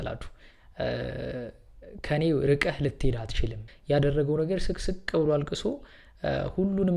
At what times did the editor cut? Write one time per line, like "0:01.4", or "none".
0:03.7

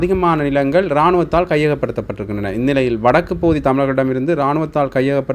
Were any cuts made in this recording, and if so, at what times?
none

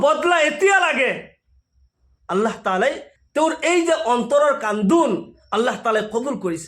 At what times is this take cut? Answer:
0:03.1

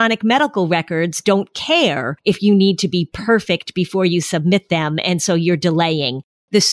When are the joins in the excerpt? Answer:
0:02.1

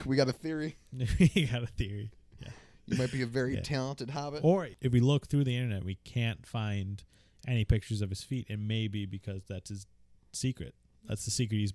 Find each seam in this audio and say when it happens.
0:04.7

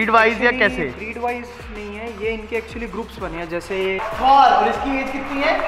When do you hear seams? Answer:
0:04.1

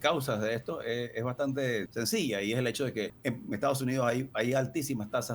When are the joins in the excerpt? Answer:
0:01.9
0:03.1

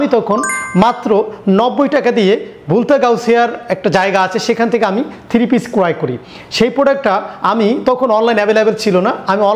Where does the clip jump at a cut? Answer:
none

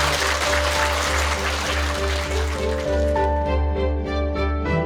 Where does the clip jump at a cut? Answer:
none

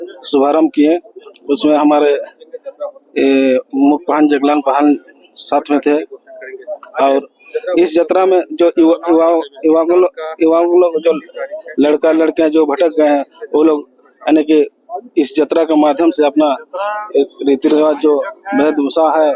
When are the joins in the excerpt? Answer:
none

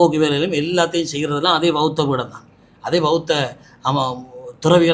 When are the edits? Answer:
none

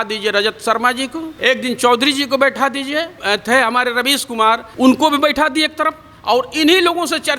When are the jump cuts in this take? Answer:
0:01.3
0:03.1
0:04.7

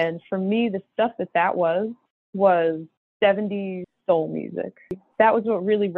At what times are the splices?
0:05.0

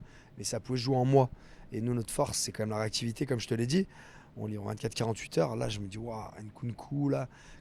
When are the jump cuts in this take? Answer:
none

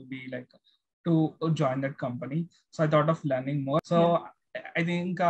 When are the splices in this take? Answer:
none

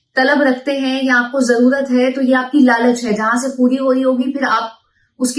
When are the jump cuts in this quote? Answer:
none

